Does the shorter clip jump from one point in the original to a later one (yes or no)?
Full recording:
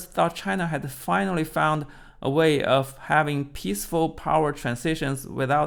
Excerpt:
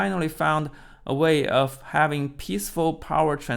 no